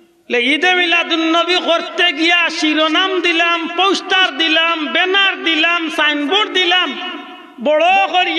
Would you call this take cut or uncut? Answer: uncut